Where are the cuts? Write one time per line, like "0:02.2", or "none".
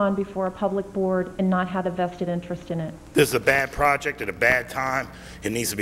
0:03.0